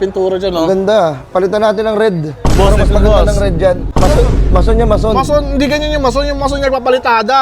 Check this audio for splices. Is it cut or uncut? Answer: cut